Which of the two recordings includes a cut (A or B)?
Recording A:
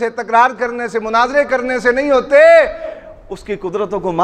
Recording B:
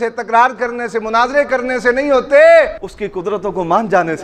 B